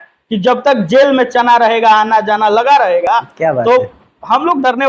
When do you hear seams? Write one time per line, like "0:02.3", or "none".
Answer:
none